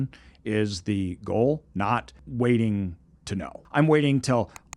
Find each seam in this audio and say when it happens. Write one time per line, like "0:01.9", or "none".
0:02.2
0:03.6